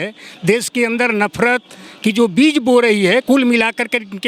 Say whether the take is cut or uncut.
uncut